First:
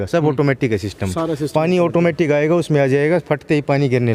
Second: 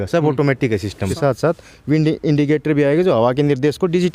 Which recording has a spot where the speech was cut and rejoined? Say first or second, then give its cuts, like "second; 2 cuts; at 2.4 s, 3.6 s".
second; 1 cut; at 1.1 s